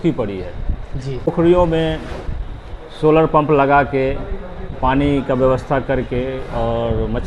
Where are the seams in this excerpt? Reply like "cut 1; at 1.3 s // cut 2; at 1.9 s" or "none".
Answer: cut 1; at 1.3 s